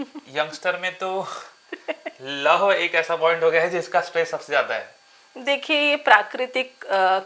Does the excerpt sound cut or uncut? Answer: uncut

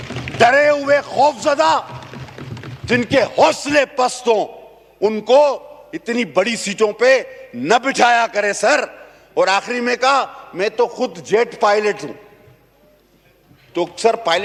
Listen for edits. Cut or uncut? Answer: uncut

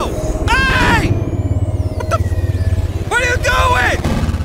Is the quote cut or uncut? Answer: uncut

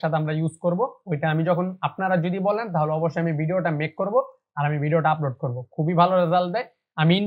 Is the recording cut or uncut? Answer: uncut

